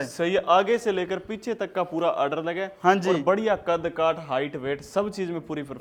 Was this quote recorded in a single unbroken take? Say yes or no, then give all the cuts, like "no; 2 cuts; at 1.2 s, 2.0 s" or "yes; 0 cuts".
yes; 0 cuts